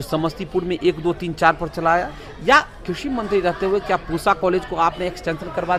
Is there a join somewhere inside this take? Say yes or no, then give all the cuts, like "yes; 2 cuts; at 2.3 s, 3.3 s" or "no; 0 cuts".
no; 0 cuts